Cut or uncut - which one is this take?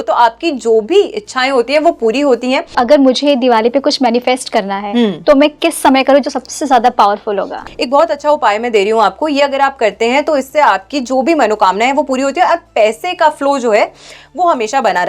cut